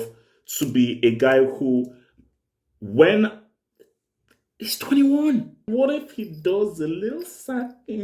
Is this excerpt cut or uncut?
cut